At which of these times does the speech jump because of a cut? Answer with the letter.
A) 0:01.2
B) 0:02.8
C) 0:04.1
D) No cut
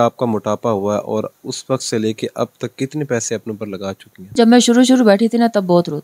C